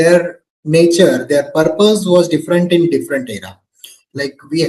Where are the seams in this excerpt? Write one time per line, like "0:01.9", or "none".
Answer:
none